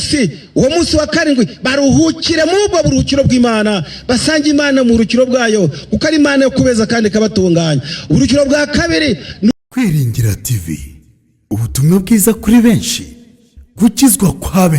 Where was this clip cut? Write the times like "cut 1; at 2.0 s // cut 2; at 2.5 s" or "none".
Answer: cut 1; at 9.5 s